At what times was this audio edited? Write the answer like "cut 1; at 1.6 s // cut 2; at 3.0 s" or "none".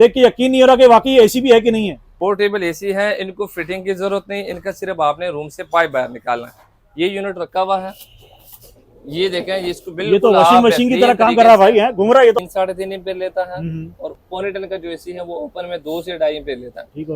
cut 1; at 2.1 s // cut 2; at 12.4 s